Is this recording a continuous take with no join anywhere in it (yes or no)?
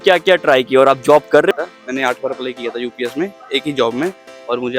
no